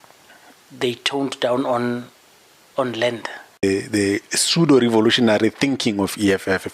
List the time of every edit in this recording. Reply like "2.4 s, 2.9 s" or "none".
3.6 s